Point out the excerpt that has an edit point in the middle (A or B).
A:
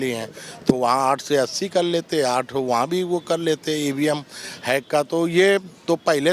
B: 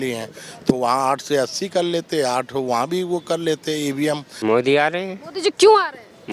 B